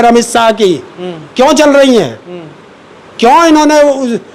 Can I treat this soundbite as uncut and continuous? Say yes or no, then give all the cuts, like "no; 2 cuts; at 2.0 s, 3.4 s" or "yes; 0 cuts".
yes; 0 cuts